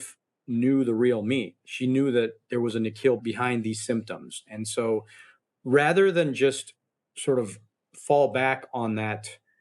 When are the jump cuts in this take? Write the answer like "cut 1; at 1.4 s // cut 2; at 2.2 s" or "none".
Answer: cut 1; at 3.2 s